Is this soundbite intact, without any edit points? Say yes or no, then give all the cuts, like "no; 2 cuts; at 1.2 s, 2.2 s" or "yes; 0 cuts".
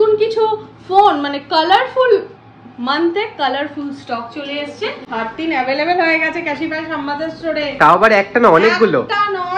no; 1 cut; at 5.1 s